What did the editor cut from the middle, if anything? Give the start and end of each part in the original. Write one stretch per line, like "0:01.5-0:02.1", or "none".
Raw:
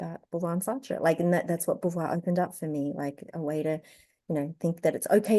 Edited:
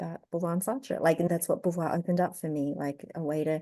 0:01.3-0:01.5